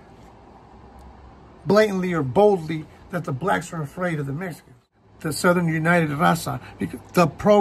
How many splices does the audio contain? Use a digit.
1